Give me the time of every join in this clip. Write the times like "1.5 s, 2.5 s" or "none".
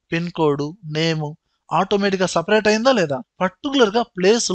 3.3 s